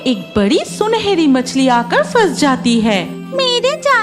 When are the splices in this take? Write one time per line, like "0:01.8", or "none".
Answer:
0:03.1

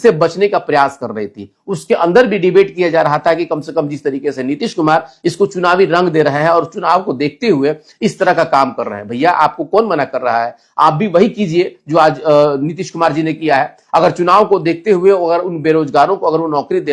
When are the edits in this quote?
none

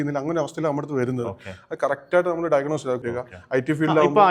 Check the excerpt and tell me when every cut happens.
0:03.2

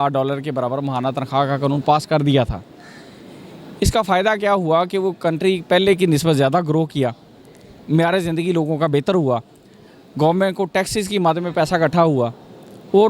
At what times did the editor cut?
none

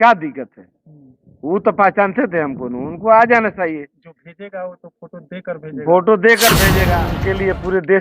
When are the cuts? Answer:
0:06.9

